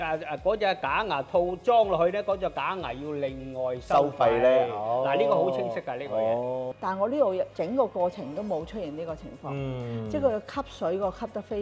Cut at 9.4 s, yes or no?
no